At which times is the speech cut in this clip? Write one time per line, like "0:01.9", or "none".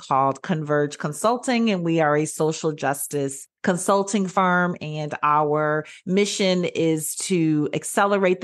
none